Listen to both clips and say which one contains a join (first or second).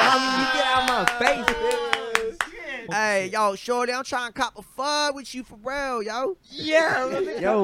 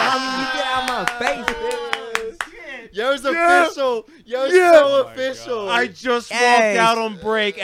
first